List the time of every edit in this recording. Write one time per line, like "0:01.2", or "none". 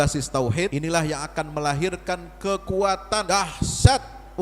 0:00.7
0:03.2